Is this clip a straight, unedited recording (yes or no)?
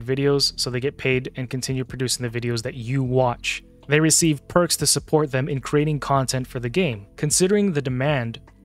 no